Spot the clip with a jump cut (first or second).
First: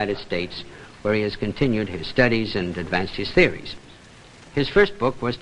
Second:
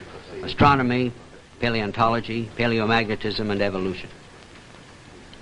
first